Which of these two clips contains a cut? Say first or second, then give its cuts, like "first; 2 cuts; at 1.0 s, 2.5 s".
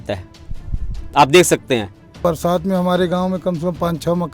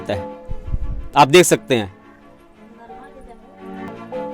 first; 1 cut; at 2.2 s